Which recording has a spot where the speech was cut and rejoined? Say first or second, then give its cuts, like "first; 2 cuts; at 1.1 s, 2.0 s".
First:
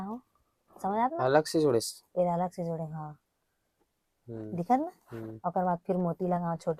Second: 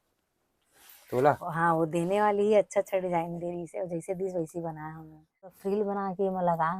second; 1 cut; at 5.6 s